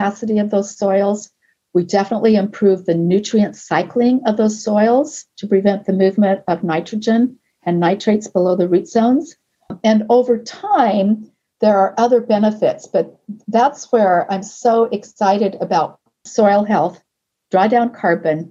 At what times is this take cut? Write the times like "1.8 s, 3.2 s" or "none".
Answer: 9.7 s, 16.3 s

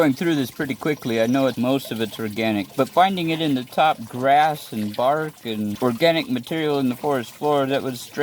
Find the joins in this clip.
1.5 s, 2.7 s, 5.7 s

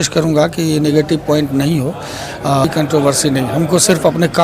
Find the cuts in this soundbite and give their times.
2.7 s

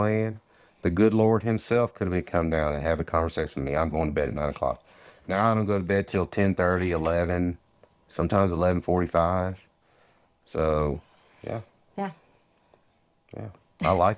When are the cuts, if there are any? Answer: none

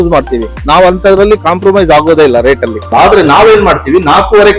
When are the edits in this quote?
2.8 s

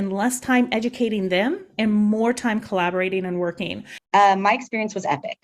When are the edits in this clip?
3.9 s

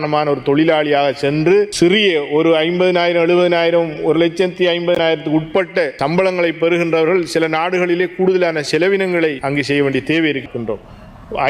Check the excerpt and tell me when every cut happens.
10.5 s

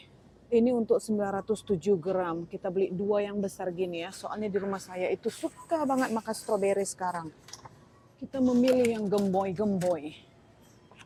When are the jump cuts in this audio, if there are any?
none

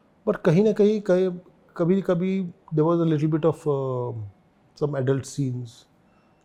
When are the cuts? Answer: none

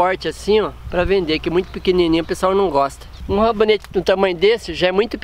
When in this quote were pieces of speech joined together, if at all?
3.1 s

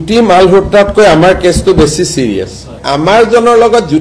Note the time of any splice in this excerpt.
2.8 s

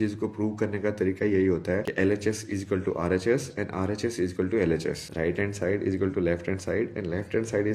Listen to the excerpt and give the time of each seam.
1.9 s, 5.1 s

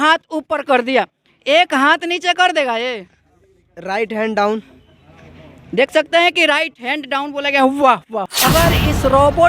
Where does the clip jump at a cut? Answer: 8.3 s

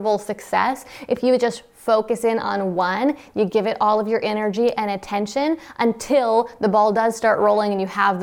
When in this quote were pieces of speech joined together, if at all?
none

